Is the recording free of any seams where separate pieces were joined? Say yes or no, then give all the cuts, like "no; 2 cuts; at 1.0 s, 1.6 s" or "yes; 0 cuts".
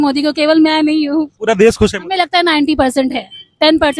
no; 1 cut; at 1.3 s